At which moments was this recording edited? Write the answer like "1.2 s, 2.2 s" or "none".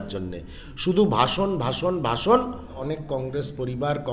2.8 s